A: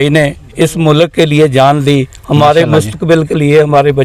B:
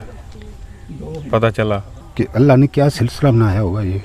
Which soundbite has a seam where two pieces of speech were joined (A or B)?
B